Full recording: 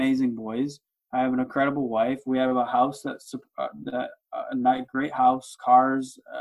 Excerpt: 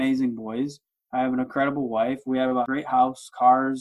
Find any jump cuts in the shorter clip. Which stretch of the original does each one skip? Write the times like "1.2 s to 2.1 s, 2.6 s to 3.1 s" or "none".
2.7 s to 4.9 s